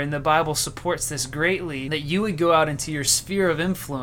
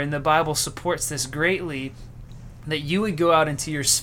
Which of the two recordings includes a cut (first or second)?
first